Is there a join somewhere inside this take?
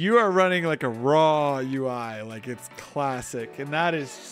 no; 0 cuts

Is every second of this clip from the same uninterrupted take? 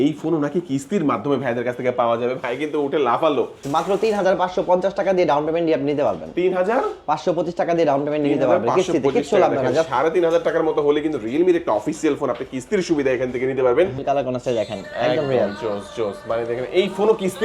no; 2 cuts; at 3.6 s, 14.0 s

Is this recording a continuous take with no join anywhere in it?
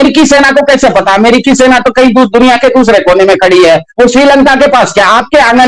yes; 0 cuts

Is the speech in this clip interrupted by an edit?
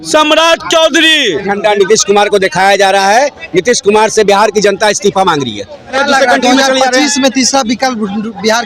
yes; 2 cuts; at 1.5 s, 6.0 s

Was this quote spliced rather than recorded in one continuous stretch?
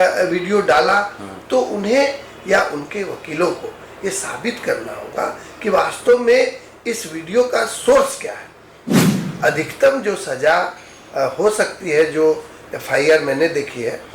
yes; 1 cut; at 9.2 s

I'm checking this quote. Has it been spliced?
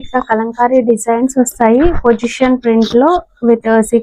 no; 0 cuts

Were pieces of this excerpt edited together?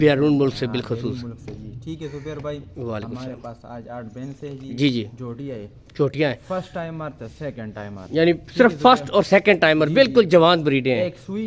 no; 0 cuts

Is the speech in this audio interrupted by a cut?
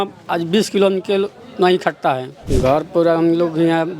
yes; 1 cut; at 2.3 s

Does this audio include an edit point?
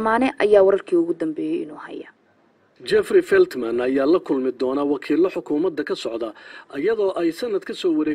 no; 0 cuts

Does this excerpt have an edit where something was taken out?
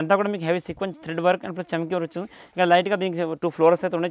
no; 0 cuts

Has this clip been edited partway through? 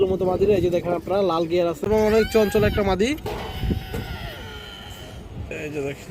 yes; 1 cut; at 1.8 s

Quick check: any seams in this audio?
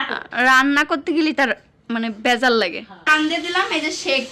yes; 1 cut; at 3.1 s

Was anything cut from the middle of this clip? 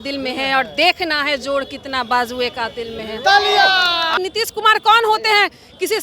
yes; 1 cut; at 4.1 s

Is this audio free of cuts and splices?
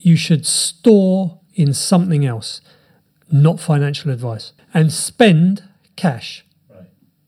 no; 1 cut; at 4.6 s

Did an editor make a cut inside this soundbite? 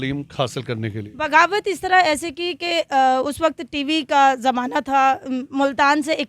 no; 0 cuts

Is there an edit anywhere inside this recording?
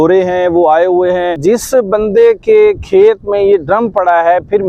yes; 1 cut; at 1.4 s

